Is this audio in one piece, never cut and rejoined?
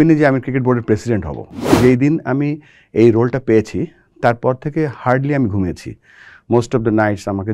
no; 1 cut; at 1.7 s

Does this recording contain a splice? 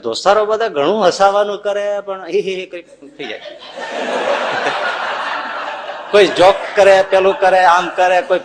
no; 0 cuts

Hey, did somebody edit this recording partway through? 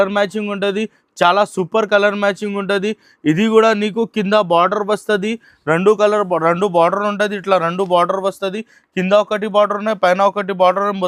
no; 0 cuts

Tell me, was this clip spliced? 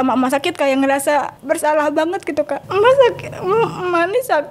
yes; 2 cuts; at 1.3 s, 2.6 s

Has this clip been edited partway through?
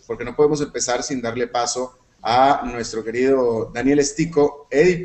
yes; 1 cut; at 1.7 s

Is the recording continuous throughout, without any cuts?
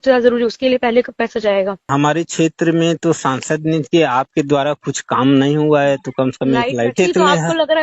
no; 2 cuts; at 1.8 s, 6.9 s

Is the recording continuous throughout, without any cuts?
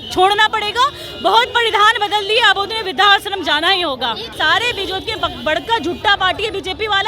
no; 1 cut; at 4.3 s

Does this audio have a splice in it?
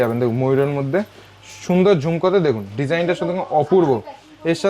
no; 0 cuts

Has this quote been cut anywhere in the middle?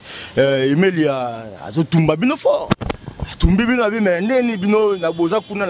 no; 0 cuts

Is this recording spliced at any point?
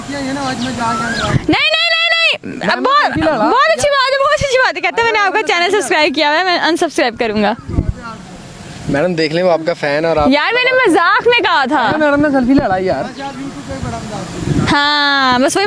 no; 0 cuts

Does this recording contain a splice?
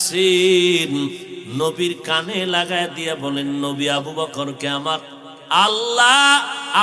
yes; 1 cut; at 1.3 s

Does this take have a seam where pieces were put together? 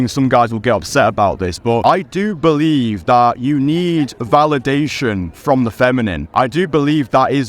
yes; 2 cuts; at 1.8 s, 6.2 s

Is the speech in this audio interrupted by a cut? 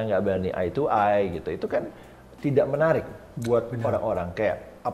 no; 0 cuts

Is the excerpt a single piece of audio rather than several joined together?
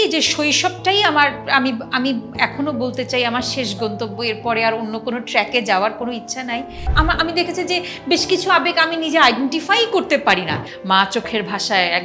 no; 2 cuts; at 6.9 s, 10.7 s

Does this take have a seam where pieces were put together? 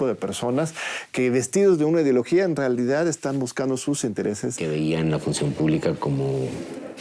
yes; 1 cut; at 4.6 s

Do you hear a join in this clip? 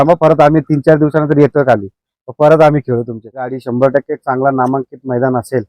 yes; 1 cut; at 3.6 s

